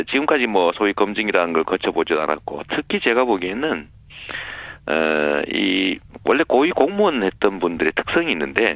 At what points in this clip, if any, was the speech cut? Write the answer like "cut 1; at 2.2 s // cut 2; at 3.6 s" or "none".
cut 1; at 4.7 s